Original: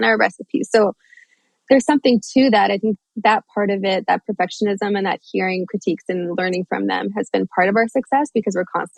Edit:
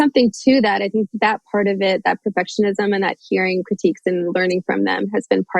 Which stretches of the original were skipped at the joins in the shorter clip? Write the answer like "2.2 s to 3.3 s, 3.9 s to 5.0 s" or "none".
3.0 s to 3.1 s